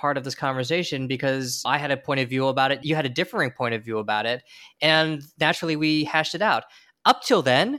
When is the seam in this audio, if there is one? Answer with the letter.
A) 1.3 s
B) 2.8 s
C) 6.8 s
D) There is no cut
B